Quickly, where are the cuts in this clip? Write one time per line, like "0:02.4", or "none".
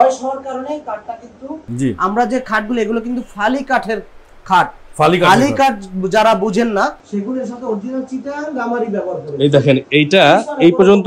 0:01.6
0:07.0